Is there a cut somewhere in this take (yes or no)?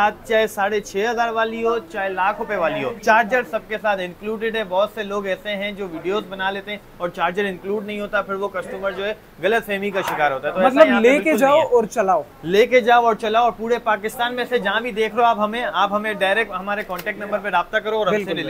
no